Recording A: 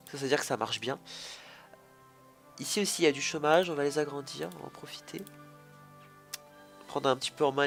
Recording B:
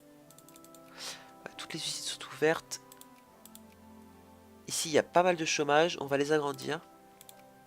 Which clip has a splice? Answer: B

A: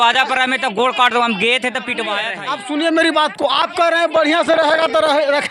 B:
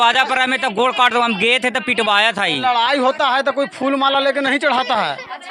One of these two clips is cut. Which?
A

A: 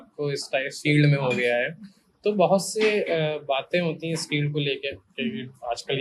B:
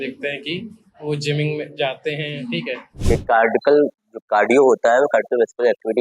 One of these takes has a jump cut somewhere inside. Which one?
B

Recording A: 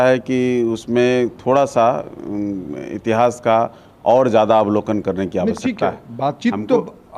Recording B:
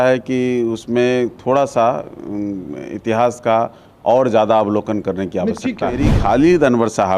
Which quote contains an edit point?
B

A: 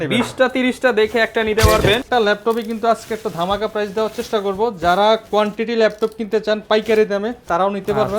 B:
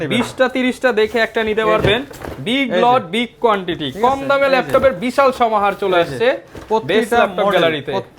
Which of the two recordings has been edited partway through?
A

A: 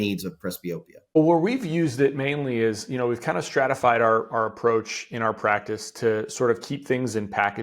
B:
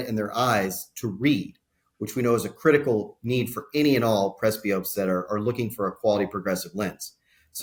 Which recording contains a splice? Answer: A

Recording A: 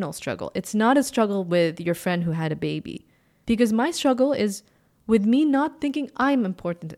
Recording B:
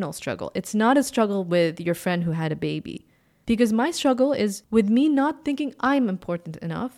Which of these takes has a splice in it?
B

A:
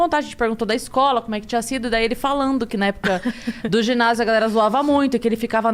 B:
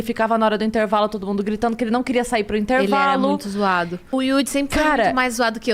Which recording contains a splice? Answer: B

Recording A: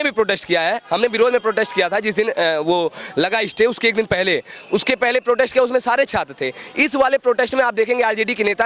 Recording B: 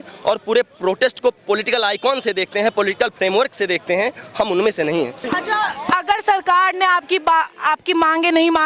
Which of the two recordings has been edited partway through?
B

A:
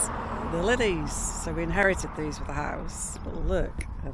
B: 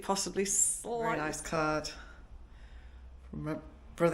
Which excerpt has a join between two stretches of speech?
B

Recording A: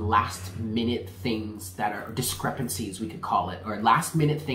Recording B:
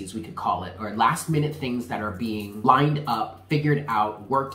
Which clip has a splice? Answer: B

